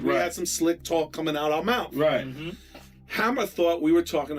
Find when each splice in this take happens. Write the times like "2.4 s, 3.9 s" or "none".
none